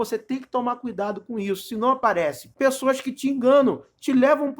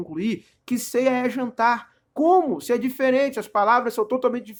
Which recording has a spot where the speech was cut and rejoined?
first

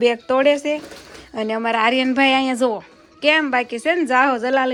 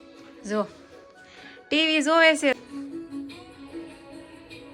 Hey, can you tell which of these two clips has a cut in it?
second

